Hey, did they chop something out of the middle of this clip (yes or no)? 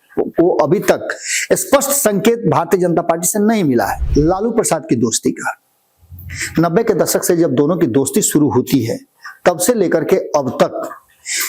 yes